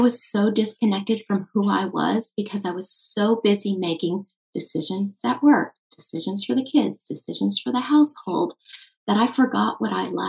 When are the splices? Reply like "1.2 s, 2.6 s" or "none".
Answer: none